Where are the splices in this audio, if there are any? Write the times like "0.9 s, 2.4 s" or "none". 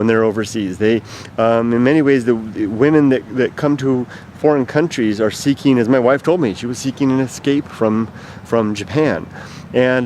5.1 s